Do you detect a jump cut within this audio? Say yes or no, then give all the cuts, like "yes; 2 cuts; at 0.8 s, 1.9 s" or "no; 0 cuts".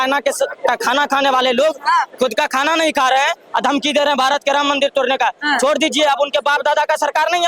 no; 0 cuts